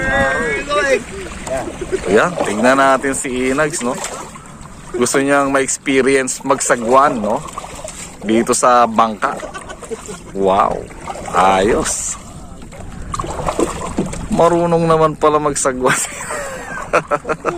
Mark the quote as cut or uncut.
uncut